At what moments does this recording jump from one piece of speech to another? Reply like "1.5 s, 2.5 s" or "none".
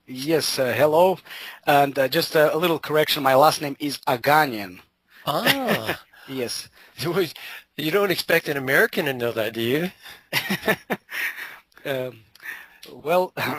6.1 s